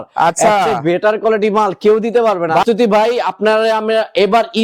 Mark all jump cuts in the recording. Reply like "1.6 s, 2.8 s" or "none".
2.6 s